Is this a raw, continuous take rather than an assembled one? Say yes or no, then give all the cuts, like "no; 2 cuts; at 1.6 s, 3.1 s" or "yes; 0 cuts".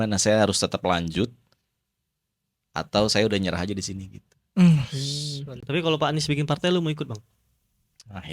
no; 1 cut; at 5.4 s